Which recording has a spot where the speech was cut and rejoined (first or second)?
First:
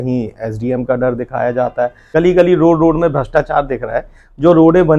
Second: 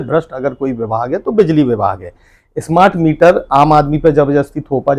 first